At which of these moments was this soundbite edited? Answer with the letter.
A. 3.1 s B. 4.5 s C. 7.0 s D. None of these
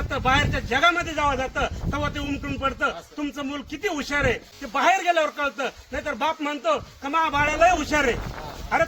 B